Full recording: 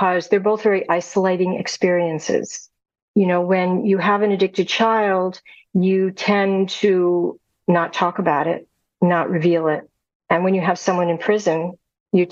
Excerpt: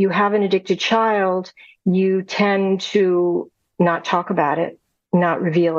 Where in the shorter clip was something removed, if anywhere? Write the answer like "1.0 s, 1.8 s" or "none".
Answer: none